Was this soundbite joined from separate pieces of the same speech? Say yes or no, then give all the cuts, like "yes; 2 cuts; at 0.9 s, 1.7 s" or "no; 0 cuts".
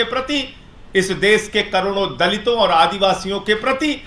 no; 0 cuts